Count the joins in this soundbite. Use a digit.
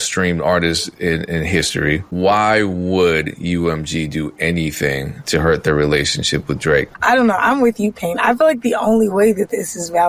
2